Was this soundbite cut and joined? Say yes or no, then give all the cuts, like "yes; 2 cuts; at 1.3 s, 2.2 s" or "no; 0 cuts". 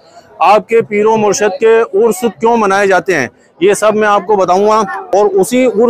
yes; 1 cut; at 5.0 s